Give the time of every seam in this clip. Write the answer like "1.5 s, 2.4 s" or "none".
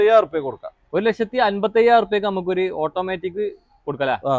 none